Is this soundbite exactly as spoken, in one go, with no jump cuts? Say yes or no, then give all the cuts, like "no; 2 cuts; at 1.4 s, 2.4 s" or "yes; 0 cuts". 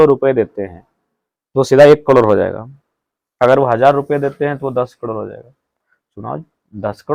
yes; 0 cuts